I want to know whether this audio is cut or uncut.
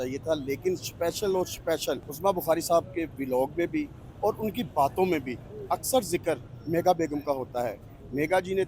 uncut